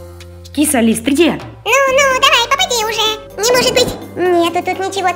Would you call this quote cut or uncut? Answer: cut